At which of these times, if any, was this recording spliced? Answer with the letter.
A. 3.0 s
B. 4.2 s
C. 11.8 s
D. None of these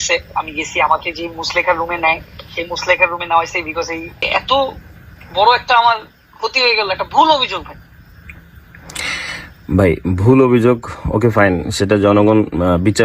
B